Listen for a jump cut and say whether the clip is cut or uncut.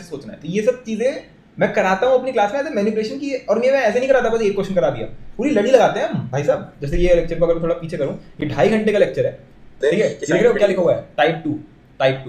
uncut